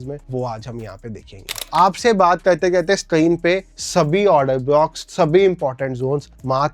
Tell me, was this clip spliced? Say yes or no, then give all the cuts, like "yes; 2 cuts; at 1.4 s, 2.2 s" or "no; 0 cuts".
yes; 3 cuts; at 1.6 s, 3.8 s, 5.0 s